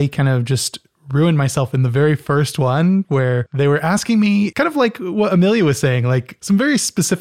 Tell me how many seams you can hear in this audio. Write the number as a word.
three